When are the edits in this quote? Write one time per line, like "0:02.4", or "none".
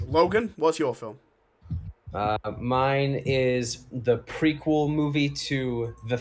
none